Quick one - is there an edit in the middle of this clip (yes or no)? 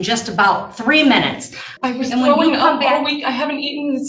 yes